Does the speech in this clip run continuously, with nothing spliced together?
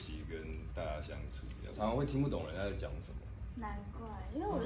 no; 1 cut; at 1.8 s

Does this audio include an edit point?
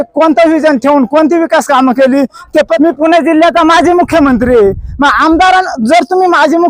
yes; 1 cut; at 2.7 s

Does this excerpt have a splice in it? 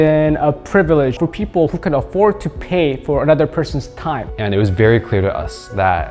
yes; 1 cut; at 4.3 s

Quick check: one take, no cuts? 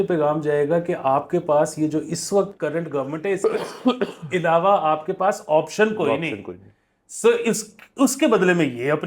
yes; 0 cuts

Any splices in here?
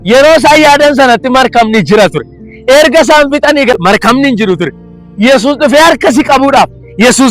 yes; 1 cut; at 3.7 s

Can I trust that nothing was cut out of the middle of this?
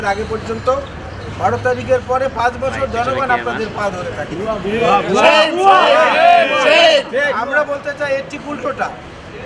yes; 0 cuts

